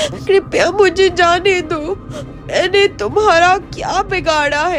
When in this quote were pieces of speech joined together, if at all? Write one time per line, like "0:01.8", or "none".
none